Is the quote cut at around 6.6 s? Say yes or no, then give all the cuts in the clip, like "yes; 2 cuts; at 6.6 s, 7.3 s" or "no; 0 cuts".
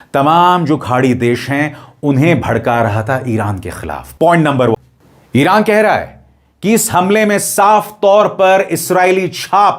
no; 1 cut; at 4.7 s